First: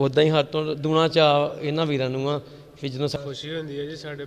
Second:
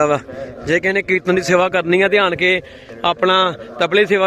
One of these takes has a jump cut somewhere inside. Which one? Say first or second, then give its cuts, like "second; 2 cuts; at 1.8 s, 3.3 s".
first; 1 cut; at 3.2 s